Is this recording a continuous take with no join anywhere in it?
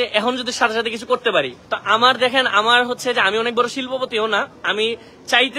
no; 1 cut; at 1.6 s

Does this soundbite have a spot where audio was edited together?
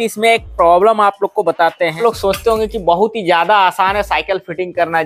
yes; 1 cut; at 2.0 s

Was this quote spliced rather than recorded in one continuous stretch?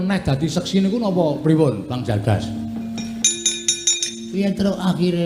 no; 0 cuts

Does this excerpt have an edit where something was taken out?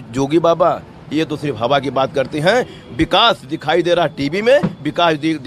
no; 0 cuts

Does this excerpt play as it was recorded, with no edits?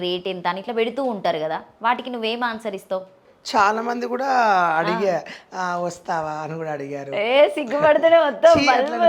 no; 1 cut; at 3.3 s

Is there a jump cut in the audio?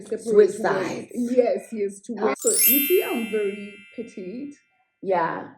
yes; 1 cut; at 2.3 s

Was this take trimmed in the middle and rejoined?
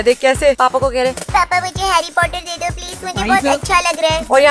no; 0 cuts

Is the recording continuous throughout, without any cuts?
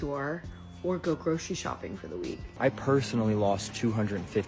no; 1 cut; at 2.4 s

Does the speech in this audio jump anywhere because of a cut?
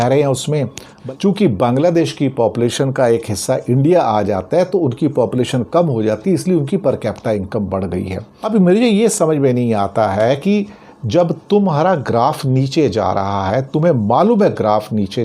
yes; 2 cuts; at 0.9 s, 8.3 s

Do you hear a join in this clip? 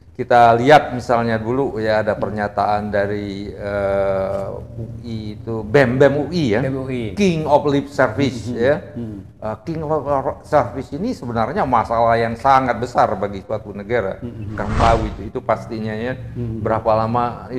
yes; 1 cut; at 14.8 s

